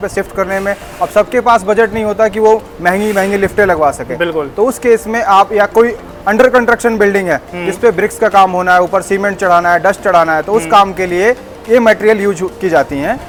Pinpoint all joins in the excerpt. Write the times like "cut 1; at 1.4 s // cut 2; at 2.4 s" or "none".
none